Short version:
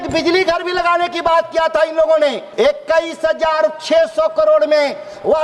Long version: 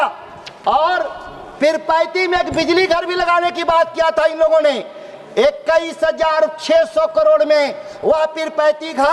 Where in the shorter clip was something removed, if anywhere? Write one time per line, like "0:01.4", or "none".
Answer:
0:02.4